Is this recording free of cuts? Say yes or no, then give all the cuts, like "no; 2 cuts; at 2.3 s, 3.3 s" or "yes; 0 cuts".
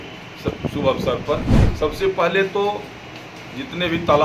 yes; 0 cuts